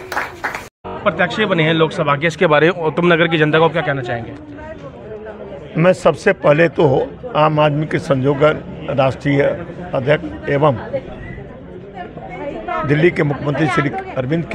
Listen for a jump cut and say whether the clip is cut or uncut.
cut